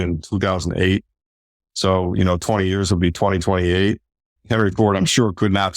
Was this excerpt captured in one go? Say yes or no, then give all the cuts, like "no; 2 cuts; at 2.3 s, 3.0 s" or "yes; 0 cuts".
no; 1 cut; at 4.4 s